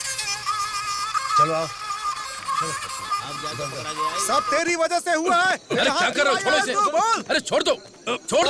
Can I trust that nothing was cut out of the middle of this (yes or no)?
no